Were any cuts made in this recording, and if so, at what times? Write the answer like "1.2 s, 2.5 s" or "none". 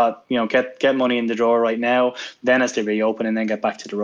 none